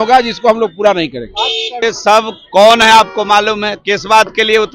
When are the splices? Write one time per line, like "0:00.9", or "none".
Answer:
0:01.8